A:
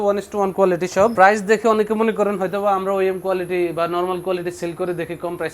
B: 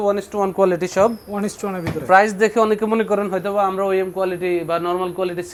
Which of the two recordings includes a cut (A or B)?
A